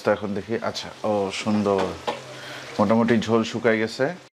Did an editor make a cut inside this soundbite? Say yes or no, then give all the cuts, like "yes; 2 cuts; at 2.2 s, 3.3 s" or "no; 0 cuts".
no; 0 cuts